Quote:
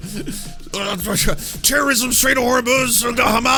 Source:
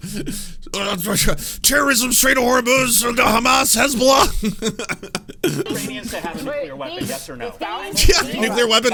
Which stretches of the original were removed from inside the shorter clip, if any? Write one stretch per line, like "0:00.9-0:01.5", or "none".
none